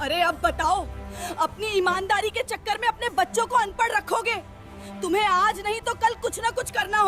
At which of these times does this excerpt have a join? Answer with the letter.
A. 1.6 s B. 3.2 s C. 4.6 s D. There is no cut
D